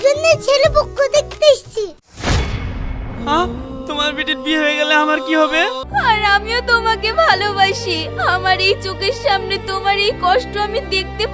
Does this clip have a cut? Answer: yes; 1 cut; at 5.8 s

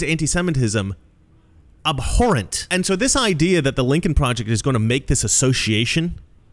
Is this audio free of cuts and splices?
no; 1 cut; at 2.6 s

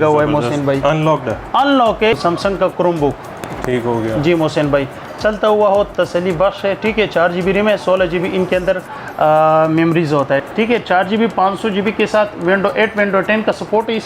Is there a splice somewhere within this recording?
yes; 2 cuts; at 2.1 s, 10.4 s

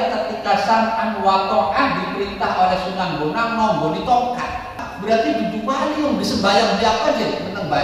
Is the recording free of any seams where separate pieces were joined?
no; 1 cut; at 4.9 s

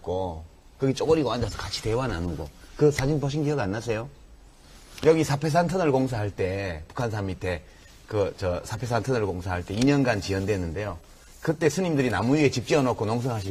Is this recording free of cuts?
yes; 0 cuts

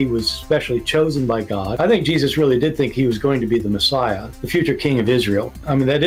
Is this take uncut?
yes; 0 cuts

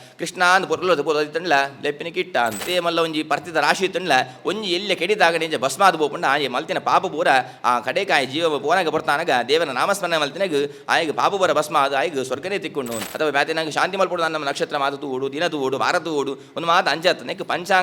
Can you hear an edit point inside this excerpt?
yes; 2 cuts; at 2.6 s, 13.1 s

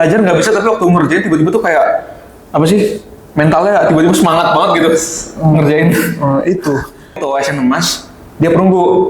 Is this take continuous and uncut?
no; 1 cut; at 7.2 s

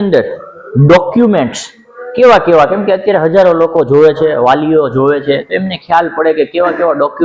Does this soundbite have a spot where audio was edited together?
no; 0 cuts

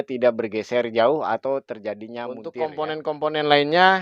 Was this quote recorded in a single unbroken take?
no; 1 cut; at 2.4 s

